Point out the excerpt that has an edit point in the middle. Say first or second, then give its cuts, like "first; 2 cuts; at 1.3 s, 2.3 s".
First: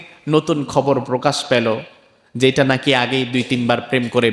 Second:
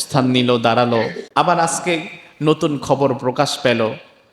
second; 1 cut; at 1.2 s